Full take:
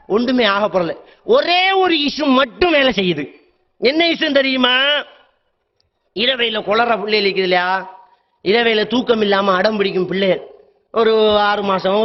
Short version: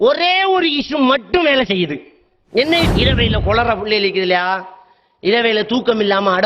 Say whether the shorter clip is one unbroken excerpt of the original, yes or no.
no